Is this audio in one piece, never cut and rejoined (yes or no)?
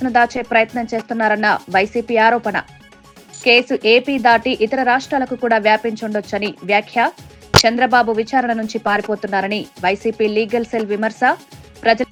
yes